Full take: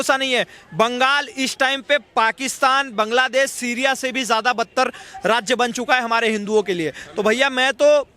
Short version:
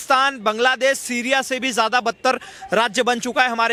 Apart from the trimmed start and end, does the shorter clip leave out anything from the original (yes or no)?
no